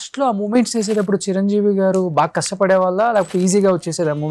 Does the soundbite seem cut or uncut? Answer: uncut